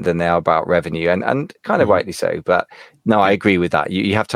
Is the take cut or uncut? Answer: uncut